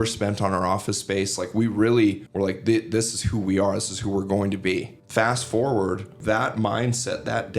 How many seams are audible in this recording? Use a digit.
3